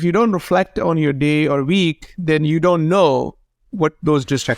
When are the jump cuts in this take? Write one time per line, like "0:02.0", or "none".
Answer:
none